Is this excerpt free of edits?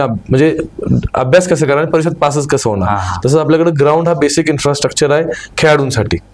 yes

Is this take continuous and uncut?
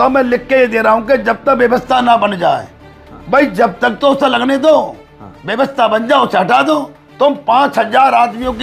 yes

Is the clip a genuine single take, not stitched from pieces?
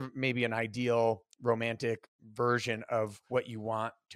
no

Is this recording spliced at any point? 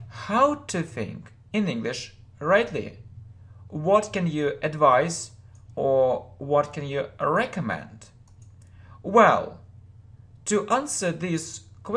no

